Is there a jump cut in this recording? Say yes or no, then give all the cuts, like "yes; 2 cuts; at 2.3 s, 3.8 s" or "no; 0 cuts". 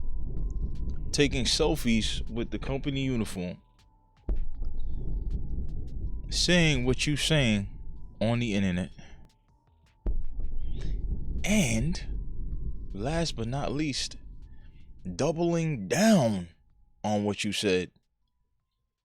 yes; 1 cut; at 0.9 s